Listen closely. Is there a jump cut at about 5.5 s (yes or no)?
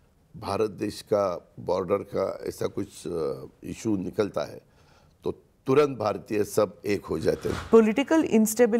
no